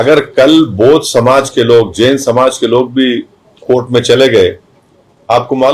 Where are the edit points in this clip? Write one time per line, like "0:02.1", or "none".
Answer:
none